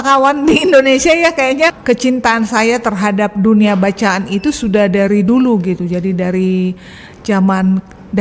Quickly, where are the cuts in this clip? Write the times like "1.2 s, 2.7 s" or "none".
1.8 s